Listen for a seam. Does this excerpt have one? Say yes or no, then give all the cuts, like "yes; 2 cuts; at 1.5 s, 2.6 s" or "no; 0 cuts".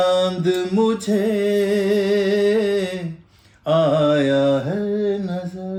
no; 0 cuts